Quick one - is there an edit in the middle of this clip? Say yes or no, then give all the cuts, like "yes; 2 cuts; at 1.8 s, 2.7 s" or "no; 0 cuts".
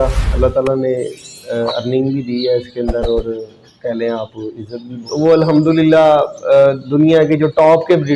yes; 1 cut; at 4.9 s